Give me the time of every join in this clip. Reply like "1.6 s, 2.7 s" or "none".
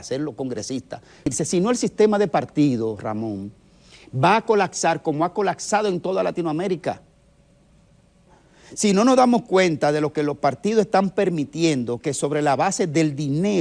1.3 s, 8.3 s